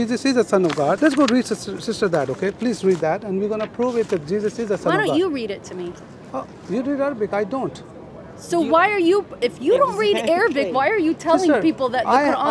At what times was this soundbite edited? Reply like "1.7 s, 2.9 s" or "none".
1.0 s